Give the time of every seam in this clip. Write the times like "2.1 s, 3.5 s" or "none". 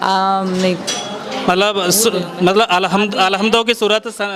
none